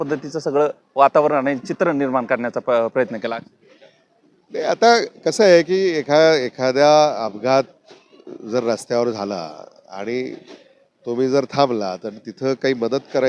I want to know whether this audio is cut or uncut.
uncut